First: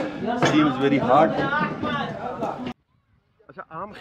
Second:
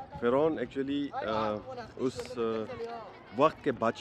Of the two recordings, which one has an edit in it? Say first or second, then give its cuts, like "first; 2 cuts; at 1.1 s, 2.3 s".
first; 1 cut; at 2.7 s